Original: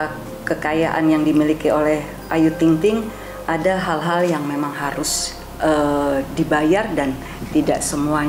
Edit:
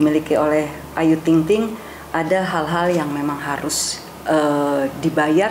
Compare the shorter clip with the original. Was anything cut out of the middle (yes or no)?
no